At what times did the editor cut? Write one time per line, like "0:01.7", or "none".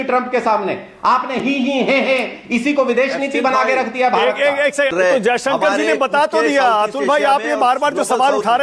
0:01.4
0:04.9